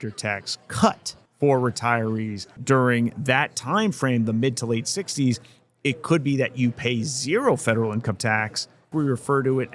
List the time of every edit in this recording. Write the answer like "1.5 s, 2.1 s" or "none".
2.6 s, 8.9 s